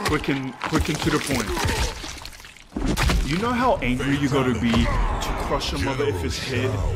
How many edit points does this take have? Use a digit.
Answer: 0